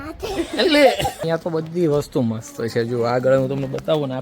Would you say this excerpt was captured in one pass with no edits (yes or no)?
no